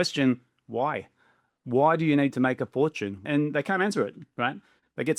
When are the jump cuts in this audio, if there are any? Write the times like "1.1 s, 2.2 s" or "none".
3.2 s